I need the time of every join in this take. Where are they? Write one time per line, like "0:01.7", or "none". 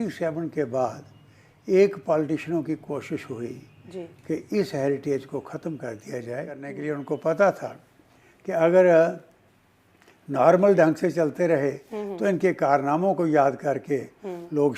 0:06.7